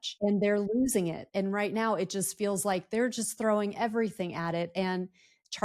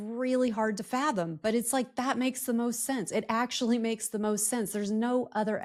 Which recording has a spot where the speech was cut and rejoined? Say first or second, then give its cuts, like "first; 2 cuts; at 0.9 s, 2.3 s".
first; 1 cut; at 1.3 s